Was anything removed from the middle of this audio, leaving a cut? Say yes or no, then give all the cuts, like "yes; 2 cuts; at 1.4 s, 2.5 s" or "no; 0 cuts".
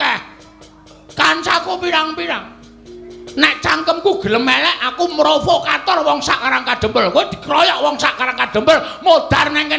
no; 0 cuts